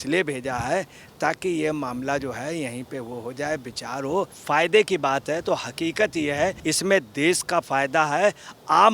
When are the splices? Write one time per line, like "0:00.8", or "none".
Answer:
0:04.4
0:06.6